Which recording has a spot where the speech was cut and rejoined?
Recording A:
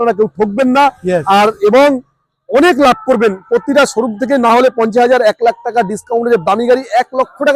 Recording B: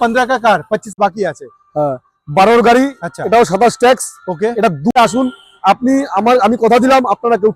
B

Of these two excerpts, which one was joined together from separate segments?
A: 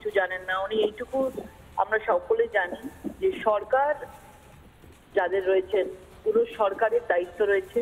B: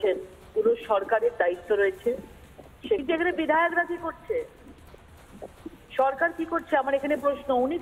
B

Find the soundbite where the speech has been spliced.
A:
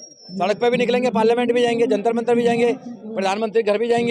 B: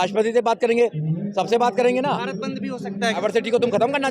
B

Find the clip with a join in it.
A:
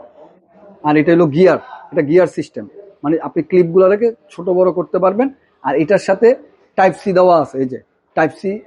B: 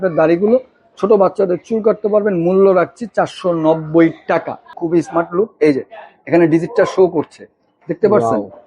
B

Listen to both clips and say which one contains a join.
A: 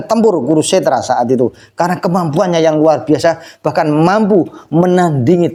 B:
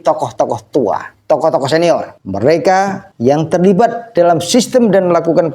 B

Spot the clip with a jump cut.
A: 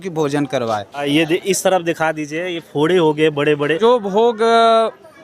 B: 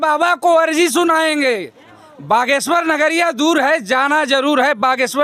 A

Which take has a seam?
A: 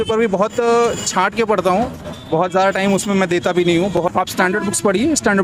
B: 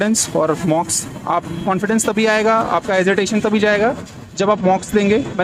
A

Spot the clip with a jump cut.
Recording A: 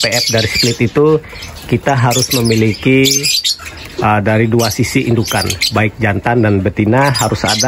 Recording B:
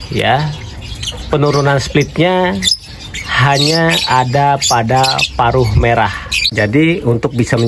B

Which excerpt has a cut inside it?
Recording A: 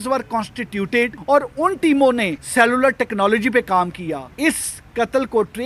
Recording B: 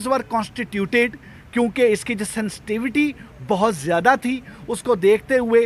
A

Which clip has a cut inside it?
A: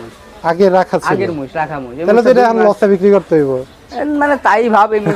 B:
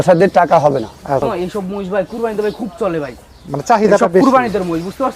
B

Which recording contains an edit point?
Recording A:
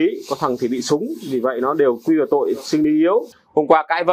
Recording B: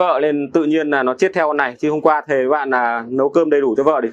A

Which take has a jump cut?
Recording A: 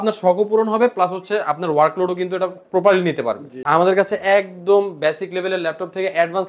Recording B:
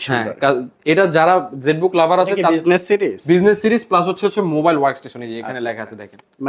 A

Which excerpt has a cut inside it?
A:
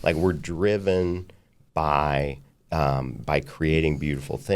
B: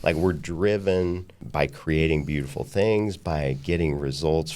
B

